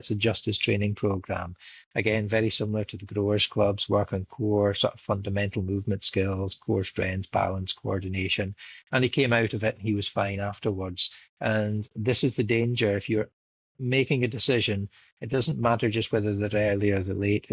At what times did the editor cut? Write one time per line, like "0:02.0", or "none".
none

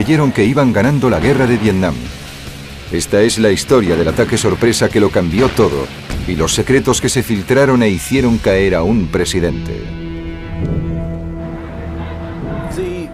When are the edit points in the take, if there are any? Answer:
0:07.6

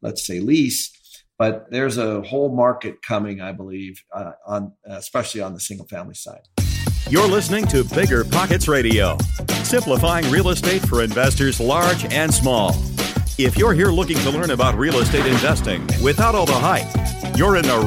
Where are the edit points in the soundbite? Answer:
0:01.6
0:06.3

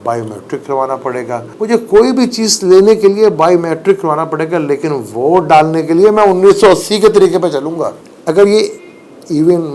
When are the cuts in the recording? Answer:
0:01.5
0:08.1

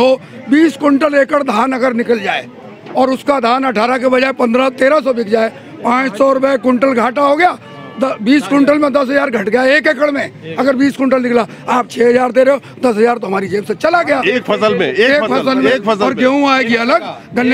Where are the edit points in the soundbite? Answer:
none

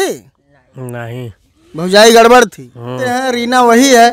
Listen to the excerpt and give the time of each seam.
0:03.2

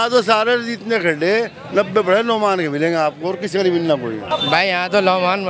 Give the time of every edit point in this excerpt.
0:04.2

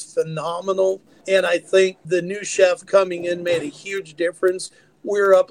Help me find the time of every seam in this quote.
0:01.1
0:02.0

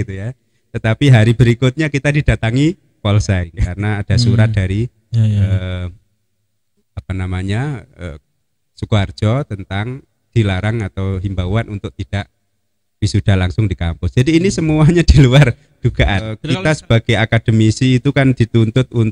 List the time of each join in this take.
0:03.6
0:16.4

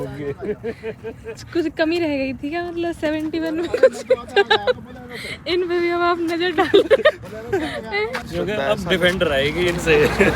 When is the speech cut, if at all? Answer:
0:01.4
0:08.2

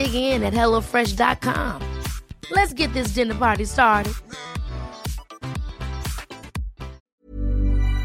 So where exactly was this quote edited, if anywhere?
0:07.0

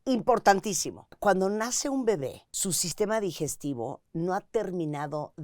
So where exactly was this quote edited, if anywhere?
0:01.2
0:02.5

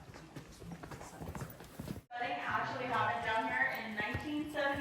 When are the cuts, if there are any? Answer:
0:02.2

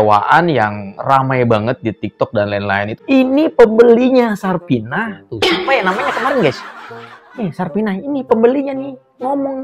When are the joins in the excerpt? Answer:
0:02.9

